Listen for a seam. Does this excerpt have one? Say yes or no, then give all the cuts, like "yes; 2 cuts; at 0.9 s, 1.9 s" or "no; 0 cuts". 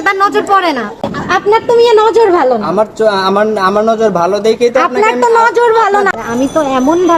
yes; 2 cuts; at 1.1 s, 6.1 s